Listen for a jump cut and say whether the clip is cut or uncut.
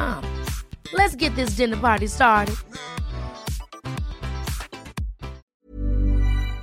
cut